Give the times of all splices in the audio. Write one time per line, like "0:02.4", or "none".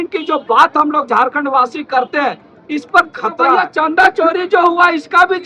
0:03.5